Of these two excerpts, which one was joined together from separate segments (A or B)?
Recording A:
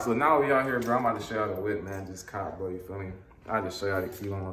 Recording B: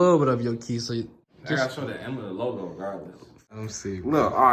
B